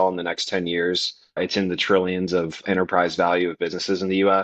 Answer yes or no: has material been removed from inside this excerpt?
yes